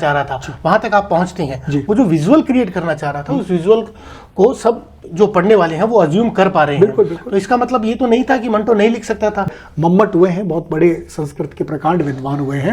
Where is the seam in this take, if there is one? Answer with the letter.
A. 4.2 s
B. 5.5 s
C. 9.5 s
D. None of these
C